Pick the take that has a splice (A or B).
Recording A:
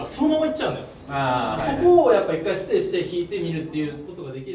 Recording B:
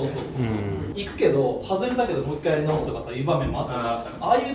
B